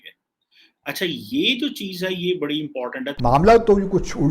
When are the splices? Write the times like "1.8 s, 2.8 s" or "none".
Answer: 3.1 s